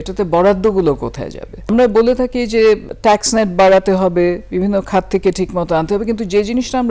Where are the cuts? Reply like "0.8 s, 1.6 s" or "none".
1.7 s, 2.9 s

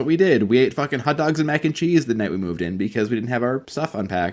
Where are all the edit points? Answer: none

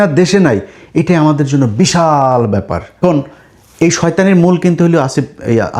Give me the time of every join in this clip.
3.0 s

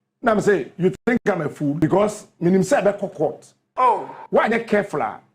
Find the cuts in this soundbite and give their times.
1.8 s

